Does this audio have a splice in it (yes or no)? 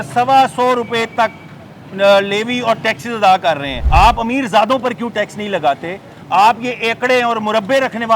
yes